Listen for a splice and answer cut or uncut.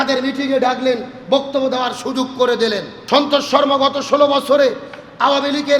cut